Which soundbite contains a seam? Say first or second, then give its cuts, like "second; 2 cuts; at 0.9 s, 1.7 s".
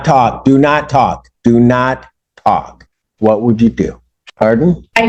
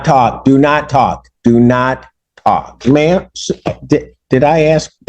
second; 1 cut; at 2.8 s